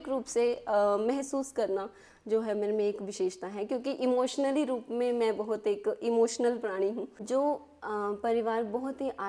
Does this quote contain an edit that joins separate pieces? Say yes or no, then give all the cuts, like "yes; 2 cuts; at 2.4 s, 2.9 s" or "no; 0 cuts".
yes; 1 cut; at 7.1 s